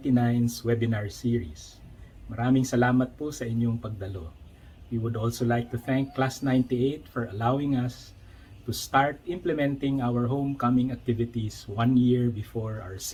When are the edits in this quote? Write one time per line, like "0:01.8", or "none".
none

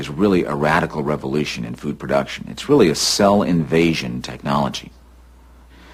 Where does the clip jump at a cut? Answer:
none

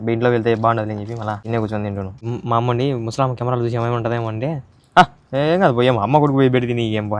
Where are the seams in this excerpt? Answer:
0:01.4
0:02.2

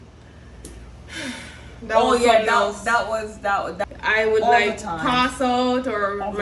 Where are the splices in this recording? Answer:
0:03.8

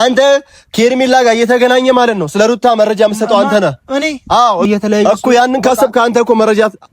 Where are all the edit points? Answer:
0:04.6

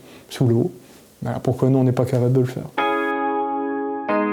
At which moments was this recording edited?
0:02.6

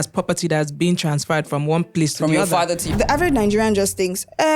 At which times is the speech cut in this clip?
0:02.8

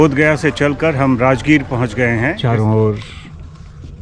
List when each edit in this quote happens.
0:02.4

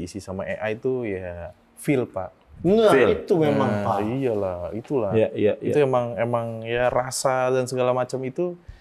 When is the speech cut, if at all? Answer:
none

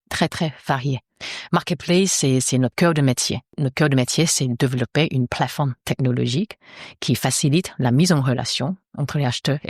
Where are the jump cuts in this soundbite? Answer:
0:03.6

